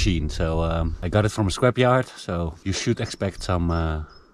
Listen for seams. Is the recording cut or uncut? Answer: cut